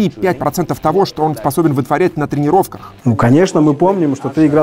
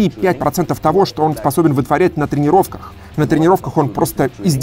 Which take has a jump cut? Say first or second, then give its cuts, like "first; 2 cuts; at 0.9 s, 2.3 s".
first; 1 cut; at 2.8 s